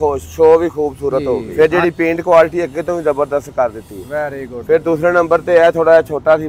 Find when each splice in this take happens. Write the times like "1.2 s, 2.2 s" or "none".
1.5 s